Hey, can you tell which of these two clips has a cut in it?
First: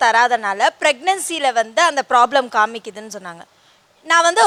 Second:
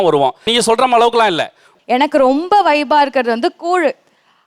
second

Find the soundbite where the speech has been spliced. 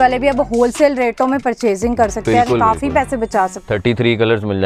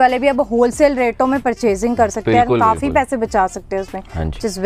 first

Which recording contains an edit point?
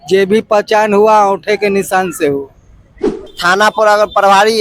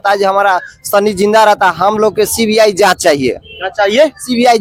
first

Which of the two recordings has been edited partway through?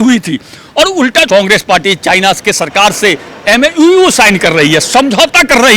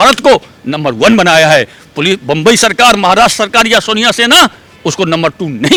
first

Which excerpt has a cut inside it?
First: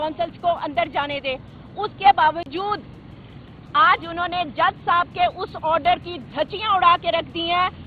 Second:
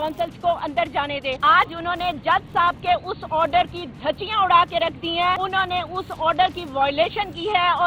second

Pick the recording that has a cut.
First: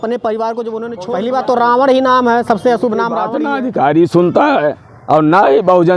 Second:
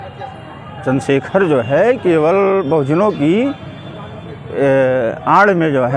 first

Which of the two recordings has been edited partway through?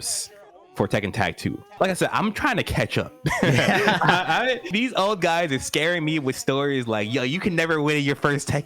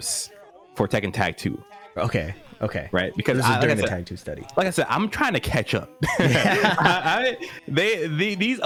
first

